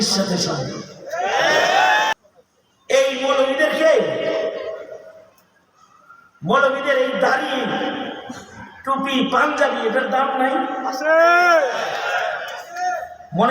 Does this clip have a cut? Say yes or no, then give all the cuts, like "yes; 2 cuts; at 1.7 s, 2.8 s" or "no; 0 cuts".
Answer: yes; 1 cut; at 2.2 s